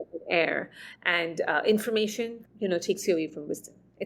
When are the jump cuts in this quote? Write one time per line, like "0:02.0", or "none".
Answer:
0:02.4